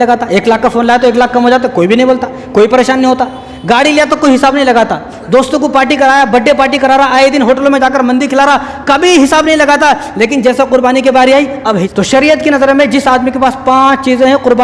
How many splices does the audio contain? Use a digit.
1